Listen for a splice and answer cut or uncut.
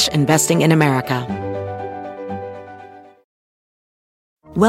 cut